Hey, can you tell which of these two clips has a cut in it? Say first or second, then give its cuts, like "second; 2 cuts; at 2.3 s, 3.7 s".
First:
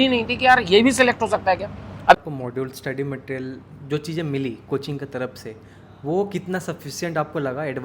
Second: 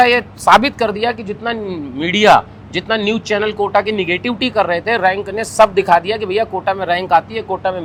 first; 1 cut; at 2.2 s